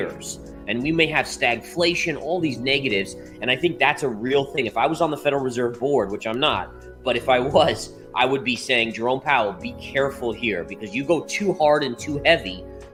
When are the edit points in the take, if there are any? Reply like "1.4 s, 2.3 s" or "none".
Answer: none